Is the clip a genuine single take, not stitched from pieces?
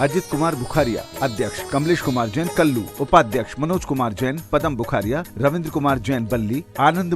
no; 2 cuts; at 1.6 s, 2.9 s

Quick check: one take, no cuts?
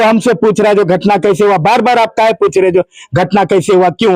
yes; 0 cuts

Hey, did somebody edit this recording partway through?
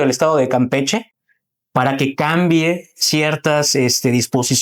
no; 0 cuts

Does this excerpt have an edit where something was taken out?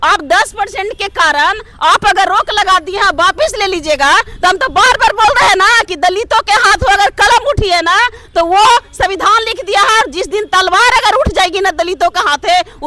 no; 0 cuts

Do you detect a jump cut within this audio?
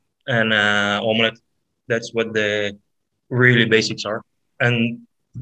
no; 0 cuts

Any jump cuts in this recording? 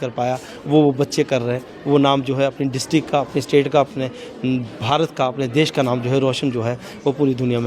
no; 0 cuts

